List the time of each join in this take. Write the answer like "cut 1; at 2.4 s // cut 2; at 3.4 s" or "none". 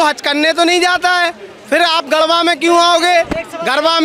none